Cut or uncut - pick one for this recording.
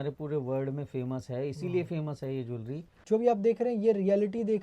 cut